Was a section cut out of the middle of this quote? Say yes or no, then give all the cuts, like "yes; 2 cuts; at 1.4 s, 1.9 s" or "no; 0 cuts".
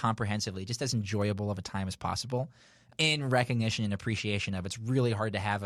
no; 0 cuts